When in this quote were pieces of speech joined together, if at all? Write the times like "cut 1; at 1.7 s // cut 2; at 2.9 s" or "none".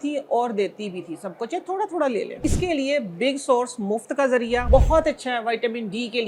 cut 1; at 2.4 s // cut 2; at 4.6 s